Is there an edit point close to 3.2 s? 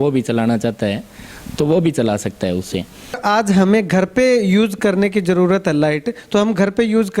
yes; 1 cut; at 3.2 s

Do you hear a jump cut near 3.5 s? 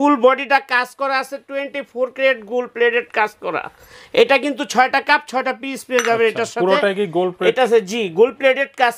no; 0 cuts

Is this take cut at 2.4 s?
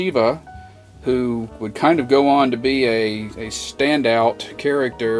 no; 0 cuts

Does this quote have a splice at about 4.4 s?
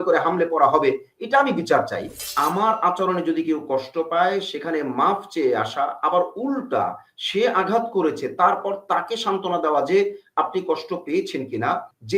no; 1 cut; at 2.3 s

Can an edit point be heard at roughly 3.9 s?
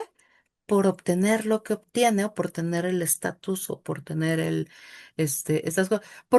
no; 0 cuts

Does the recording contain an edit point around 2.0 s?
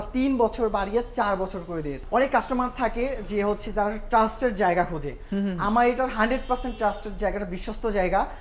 yes; 1 cut; at 2.0 s

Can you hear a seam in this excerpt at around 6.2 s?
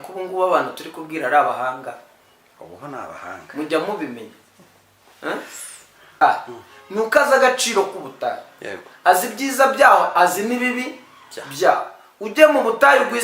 yes; 1 cut; at 6.2 s

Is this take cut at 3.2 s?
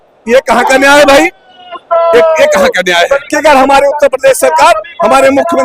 yes; 1 cut; at 3.2 s

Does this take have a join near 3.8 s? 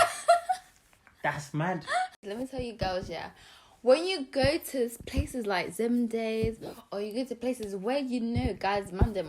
no; 1 cut; at 2.2 s

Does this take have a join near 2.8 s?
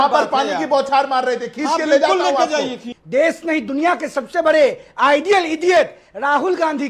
yes; 1 cut; at 2.8 s

